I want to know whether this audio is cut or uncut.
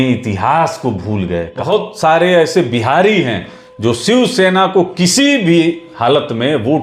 cut